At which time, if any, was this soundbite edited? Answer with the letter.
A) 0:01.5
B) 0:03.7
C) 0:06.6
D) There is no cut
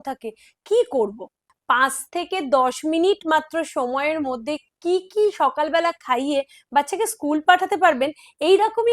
A